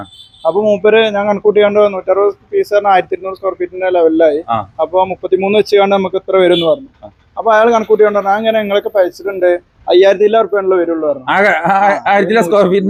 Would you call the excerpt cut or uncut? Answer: uncut